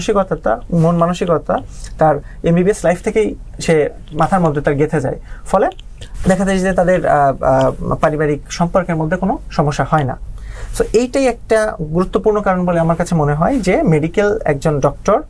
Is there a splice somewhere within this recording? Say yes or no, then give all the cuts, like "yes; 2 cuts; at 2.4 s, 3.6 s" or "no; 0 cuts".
no; 0 cuts